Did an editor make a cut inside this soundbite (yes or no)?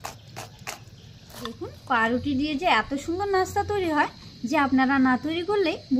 yes